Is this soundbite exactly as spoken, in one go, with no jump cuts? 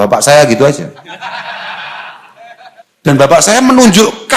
no; 1 cut; at 3.3 s

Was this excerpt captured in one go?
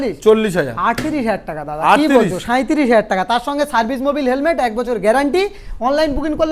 yes; 0 cuts

